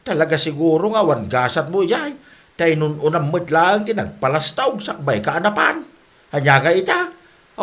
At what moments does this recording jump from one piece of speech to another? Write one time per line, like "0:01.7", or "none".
none